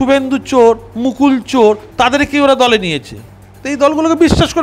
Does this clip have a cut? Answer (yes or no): no